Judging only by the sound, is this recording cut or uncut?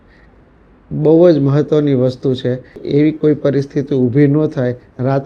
cut